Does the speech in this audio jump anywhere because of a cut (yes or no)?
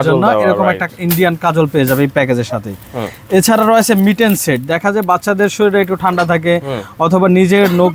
no